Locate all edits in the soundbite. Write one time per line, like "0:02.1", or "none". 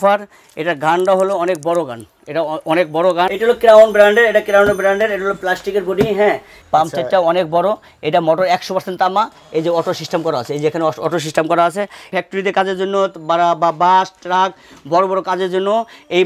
0:03.3
0:06.5
0:12.1